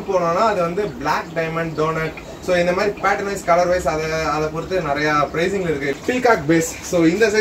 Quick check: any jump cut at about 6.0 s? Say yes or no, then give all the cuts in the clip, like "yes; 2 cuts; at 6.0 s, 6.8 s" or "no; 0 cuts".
yes; 1 cut; at 6.0 s